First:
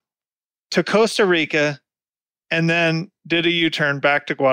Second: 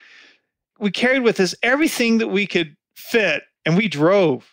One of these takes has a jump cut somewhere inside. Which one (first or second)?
second